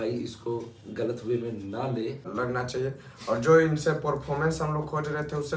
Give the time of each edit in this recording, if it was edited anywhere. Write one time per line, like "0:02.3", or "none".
0:02.3